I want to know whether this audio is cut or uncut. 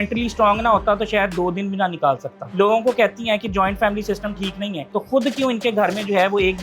cut